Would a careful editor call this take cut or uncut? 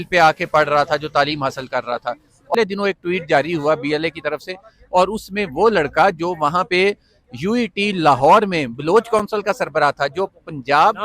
cut